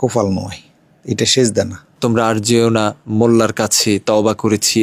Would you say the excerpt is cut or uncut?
cut